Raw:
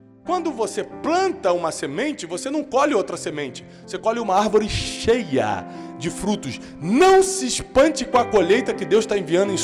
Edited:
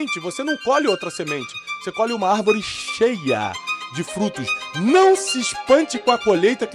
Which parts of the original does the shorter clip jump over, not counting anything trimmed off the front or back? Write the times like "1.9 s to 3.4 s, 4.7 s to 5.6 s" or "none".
none